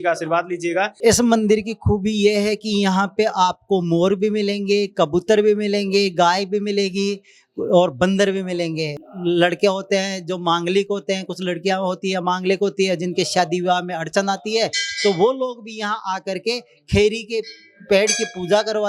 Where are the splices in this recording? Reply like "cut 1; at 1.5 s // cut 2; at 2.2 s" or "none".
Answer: cut 1; at 1.0 s // cut 2; at 9.0 s